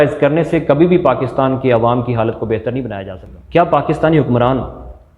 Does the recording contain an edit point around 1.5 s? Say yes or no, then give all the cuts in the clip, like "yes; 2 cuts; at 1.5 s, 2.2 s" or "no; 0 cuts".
no; 1 cut; at 2.9 s